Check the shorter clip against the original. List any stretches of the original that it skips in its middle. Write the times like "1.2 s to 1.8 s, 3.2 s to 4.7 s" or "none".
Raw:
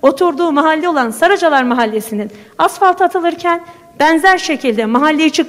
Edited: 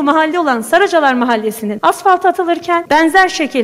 2.2 s to 2.4 s, 3.6 s to 3.9 s